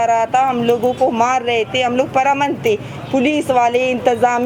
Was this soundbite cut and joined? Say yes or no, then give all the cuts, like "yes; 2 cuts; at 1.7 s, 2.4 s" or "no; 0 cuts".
no; 0 cuts